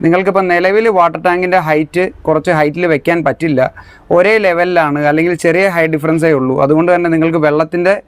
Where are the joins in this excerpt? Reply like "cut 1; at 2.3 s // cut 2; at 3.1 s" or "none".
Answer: none